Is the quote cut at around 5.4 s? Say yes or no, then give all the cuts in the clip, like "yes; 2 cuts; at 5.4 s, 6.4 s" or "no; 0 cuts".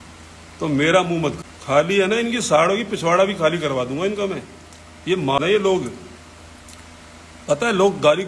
yes; 2 cuts; at 1.4 s, 5.4 s